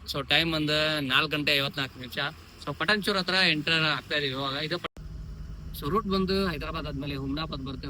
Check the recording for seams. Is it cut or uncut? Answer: cut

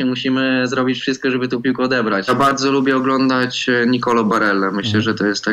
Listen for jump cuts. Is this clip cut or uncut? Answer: cut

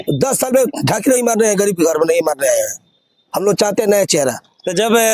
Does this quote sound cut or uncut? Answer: uncut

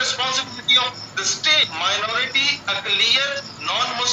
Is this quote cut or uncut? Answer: cut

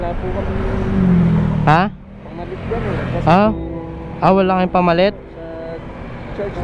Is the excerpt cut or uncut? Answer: uncut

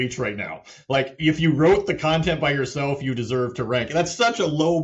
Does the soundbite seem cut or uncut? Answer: uncut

